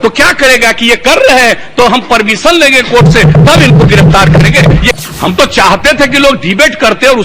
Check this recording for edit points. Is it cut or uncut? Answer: cut